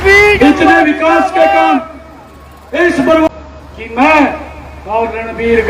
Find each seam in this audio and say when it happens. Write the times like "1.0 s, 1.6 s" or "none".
3.3 s